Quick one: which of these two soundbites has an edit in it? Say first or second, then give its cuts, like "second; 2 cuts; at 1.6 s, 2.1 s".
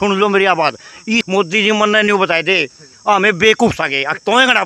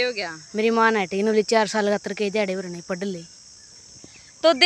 first; 1 cut; at 1.3 s